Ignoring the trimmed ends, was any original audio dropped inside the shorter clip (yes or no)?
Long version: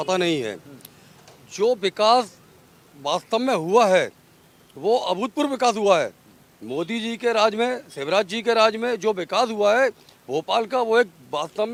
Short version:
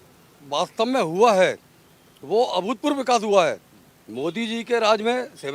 no